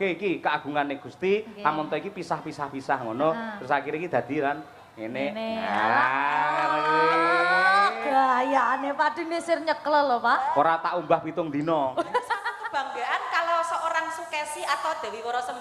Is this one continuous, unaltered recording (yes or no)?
no